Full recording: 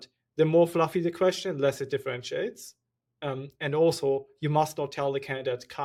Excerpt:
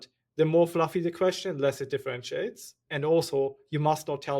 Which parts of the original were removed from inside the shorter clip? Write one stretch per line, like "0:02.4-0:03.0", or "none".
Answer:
0:02.8-0:03.5